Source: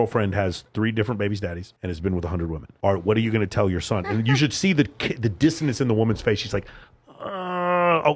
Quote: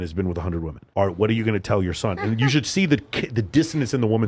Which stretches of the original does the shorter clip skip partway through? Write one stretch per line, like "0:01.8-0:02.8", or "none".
none